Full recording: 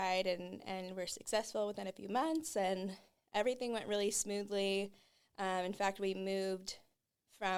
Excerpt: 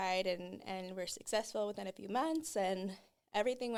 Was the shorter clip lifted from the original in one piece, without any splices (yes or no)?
yes